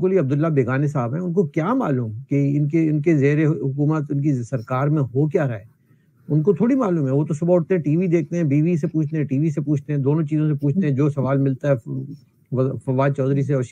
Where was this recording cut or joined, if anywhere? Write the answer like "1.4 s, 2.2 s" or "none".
none

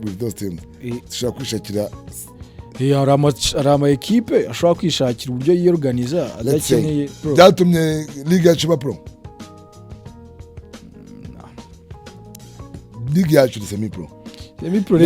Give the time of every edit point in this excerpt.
7.2 s

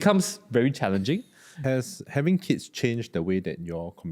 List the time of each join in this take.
1.5 s

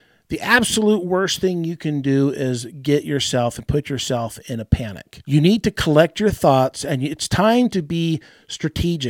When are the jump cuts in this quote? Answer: none

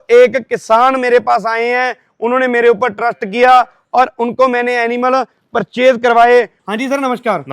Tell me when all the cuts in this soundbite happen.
6.6 s

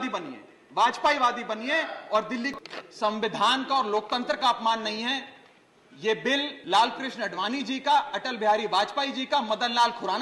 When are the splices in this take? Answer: 2.5 s

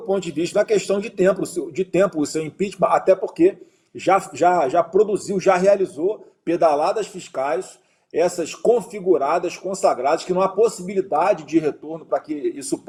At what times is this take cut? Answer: none

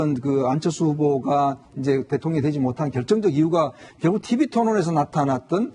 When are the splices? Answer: 2.8 s

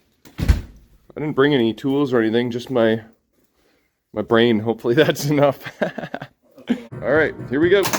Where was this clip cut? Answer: 6.9 s

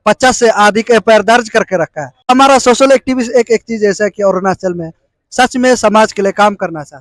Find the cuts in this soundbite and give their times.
2.3 s

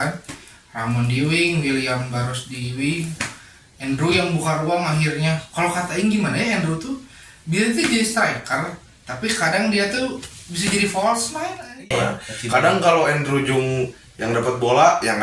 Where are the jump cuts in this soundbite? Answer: 11.8 s

